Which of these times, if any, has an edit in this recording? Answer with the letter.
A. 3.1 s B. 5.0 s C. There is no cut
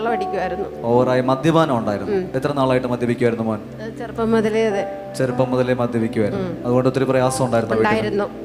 C